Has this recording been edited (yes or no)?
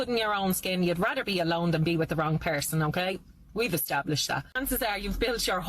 yes